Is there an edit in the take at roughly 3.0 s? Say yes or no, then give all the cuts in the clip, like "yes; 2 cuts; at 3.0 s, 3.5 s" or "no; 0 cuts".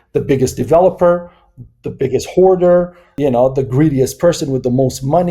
yes; 1 cut; at 3.0 s